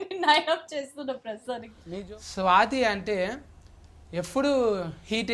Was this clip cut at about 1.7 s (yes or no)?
yes